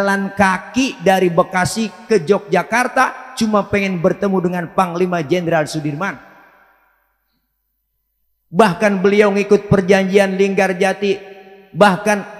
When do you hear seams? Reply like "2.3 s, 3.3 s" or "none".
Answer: none